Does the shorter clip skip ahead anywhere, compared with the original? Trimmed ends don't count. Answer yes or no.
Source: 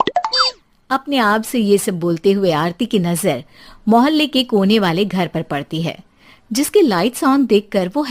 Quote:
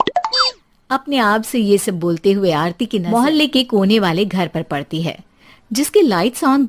yes